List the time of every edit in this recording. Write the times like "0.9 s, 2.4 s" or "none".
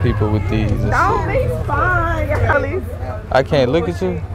2.5 s